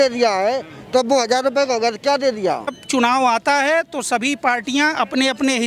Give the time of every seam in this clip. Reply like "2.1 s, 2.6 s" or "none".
2.8 s